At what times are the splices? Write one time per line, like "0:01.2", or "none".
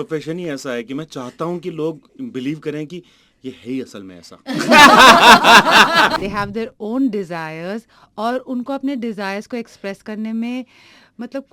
0:06.2